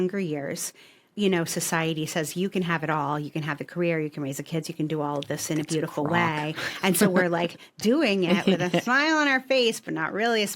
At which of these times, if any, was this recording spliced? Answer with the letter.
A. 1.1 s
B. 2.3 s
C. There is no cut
A